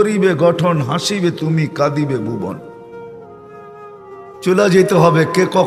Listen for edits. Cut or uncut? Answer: uncut